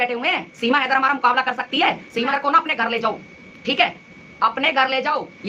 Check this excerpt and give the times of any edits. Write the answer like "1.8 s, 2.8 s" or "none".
2.3 s